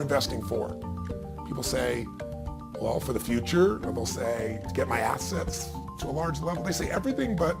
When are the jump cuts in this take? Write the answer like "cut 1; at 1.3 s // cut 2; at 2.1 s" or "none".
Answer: none